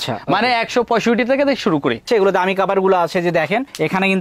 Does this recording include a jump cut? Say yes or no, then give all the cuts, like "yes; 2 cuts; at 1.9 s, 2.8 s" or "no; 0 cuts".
yes; 1 cut; at 2.1 s